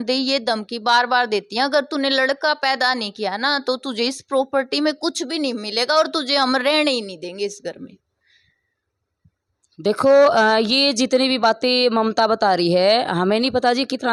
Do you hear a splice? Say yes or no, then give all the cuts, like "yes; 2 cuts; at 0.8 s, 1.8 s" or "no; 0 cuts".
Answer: no; 0 cuts